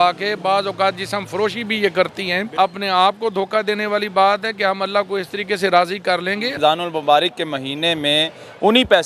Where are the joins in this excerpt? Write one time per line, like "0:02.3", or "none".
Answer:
0:02.4
0:06.5